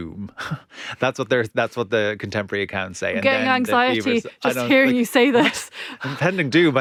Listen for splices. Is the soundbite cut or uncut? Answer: uncut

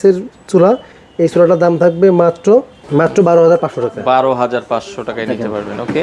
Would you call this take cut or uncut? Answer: uncut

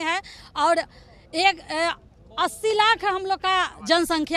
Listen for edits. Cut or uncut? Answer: uncut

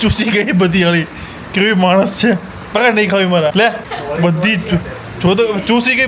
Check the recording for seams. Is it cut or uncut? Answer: uncut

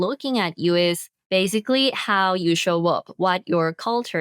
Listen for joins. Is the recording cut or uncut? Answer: cut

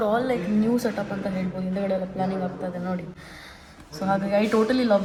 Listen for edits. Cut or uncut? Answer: uncut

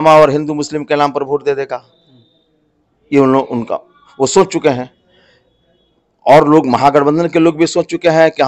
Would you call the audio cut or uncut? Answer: uncut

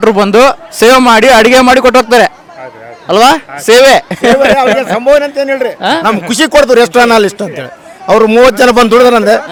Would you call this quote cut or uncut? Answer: uncut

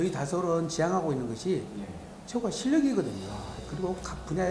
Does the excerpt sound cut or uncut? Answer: cut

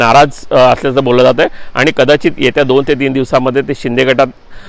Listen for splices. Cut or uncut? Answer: uncut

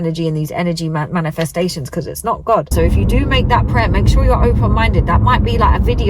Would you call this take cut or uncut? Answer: cut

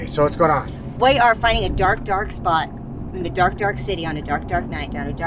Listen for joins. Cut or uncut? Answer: uncut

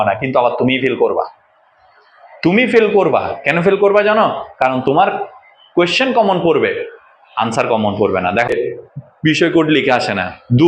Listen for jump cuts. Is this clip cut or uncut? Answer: cut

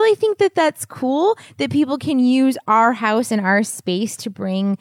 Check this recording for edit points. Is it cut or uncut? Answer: uncut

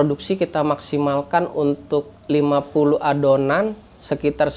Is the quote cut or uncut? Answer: uncut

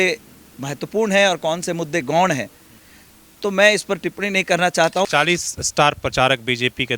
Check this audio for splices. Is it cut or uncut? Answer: cut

